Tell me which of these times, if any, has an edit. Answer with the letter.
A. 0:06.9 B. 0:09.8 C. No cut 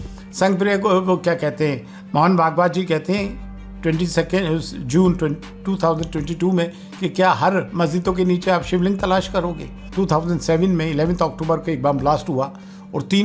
B